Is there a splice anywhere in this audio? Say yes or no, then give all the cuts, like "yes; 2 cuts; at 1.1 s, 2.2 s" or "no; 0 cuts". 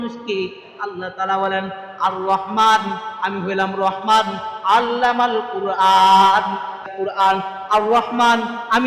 yes; 1 cut; at 6.9 s